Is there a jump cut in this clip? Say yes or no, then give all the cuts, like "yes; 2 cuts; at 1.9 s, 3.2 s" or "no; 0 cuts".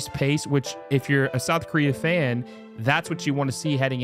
no; 0 cuts